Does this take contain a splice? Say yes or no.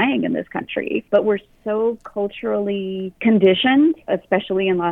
yes